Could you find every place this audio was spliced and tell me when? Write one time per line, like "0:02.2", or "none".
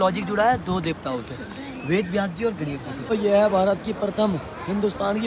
0:03.1